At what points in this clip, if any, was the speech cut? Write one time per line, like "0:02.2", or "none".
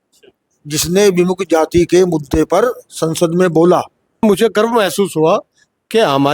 0:04.2